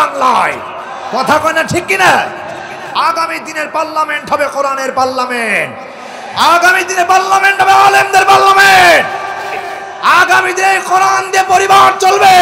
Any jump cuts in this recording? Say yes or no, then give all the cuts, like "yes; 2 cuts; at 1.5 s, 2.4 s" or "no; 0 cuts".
yes; 2 cuts; at 2.8 s, 9.6 s